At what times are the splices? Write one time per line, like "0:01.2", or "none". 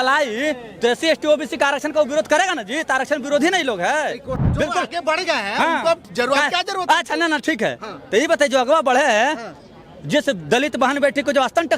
0:04.3